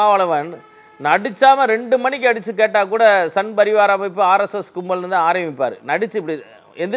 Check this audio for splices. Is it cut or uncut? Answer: uncut